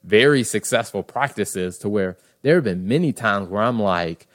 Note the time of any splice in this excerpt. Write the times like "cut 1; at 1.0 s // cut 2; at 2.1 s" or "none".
none